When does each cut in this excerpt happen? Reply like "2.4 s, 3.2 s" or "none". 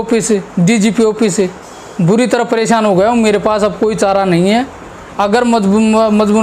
none